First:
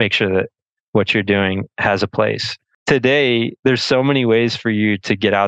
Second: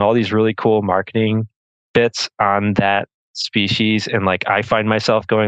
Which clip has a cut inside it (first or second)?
first